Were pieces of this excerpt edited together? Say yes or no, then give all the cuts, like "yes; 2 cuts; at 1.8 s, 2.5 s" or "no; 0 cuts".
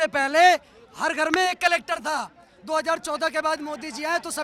no; 0 cuts